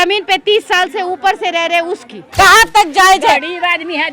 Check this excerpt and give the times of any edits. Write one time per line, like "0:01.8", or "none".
0:02.2